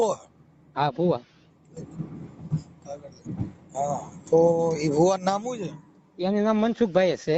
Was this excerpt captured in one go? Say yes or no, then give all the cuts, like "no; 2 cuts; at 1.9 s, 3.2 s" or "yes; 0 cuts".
yes; 0 cuts